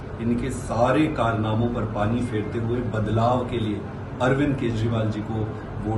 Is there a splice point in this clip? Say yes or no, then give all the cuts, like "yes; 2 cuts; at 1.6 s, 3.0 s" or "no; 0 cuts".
no; 0 cuts